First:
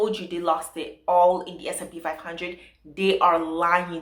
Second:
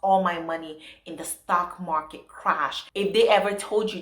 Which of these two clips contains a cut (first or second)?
second